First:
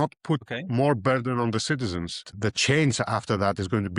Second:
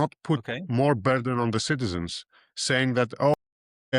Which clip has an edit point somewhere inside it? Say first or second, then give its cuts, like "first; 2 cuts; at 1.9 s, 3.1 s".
first; 1 cut; at 2.3 s